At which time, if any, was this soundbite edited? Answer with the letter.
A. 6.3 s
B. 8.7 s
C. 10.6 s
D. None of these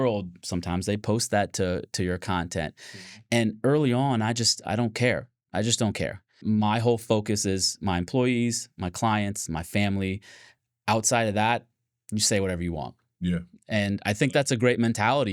A